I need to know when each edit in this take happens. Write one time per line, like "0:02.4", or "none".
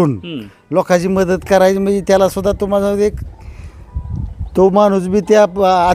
none